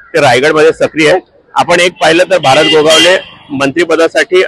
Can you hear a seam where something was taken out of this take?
no; 0 cuts

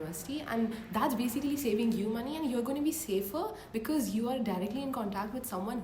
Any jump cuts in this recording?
no; 0 cuts

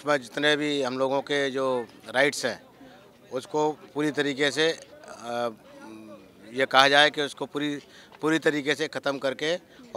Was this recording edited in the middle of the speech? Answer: no; 0 cuts

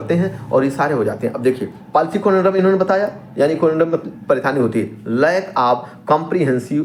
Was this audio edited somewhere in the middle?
no; 0 cuts

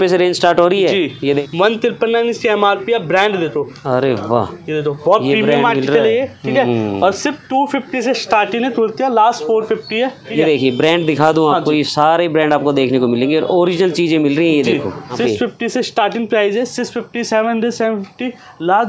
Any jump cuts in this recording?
yes; 3 cuts; at 1.4 s, 10.2 s, 15.2 s

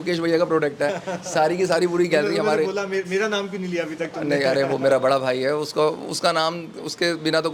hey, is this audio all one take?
yes; 0 cuts

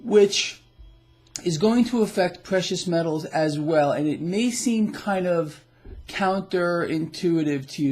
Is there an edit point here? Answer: yes; 1 cut; at 4.7 s

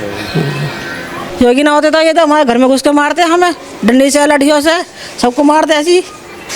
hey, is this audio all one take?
no; 1 cut; at 1.2 s

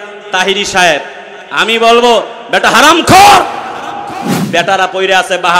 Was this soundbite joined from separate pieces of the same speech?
yes; 1 cut; at 4.3 s

